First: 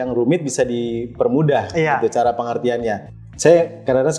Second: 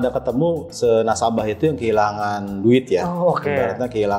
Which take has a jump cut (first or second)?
first